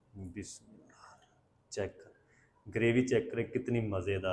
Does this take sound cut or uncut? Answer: uncut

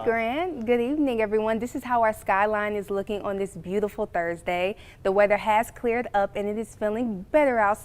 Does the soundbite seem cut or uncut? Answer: uncut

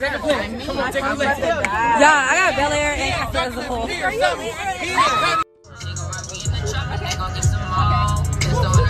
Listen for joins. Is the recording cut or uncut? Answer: uncut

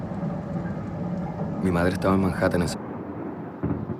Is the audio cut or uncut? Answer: uncut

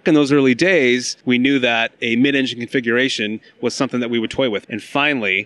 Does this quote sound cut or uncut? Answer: cut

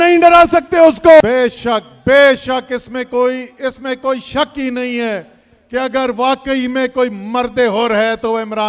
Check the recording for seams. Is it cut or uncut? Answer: cut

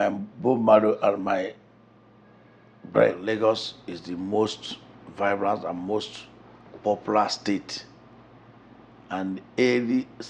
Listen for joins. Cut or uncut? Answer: cut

